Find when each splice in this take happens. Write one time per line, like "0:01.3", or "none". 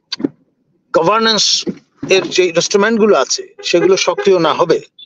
none